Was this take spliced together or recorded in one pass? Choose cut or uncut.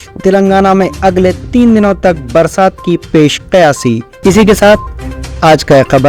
uncut